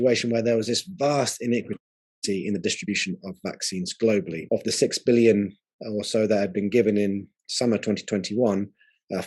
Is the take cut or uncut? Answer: cut